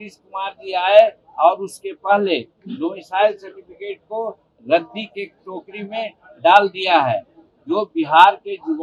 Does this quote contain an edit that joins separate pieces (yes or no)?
no